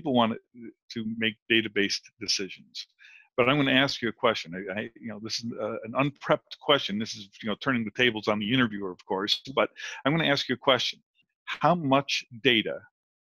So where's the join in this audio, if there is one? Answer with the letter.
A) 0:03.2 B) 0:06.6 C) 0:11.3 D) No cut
C